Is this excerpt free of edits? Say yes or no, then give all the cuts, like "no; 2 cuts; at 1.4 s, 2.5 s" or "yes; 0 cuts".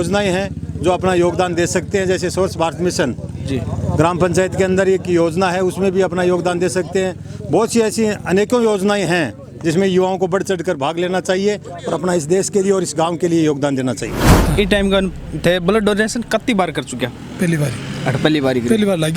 no; 1 cut; at 14.2 s